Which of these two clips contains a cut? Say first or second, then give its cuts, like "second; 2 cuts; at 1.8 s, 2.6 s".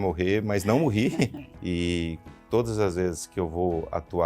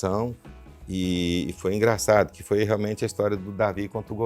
first; 1 cut; at 1.5 s